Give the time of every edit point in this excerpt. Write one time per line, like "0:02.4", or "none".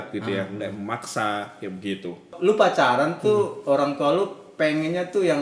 0:02.3